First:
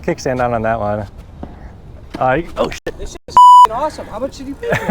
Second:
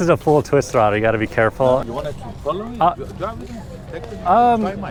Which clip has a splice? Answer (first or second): first